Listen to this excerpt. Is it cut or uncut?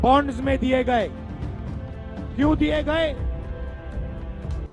uncut